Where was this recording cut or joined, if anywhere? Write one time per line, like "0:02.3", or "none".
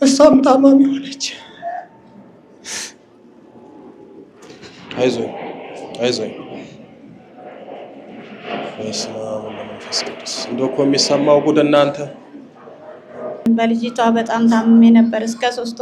0:13.5